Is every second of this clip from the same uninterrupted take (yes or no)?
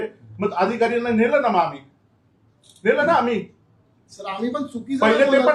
yes